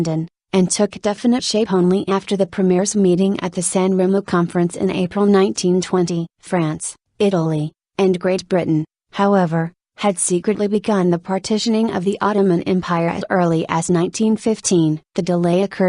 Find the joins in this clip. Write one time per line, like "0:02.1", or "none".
0:06.9